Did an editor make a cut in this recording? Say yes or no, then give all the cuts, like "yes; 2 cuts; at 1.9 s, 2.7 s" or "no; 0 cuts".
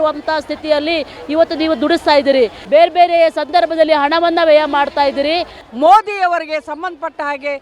yes; 2 cuts; at 2.6 s, 5.6 s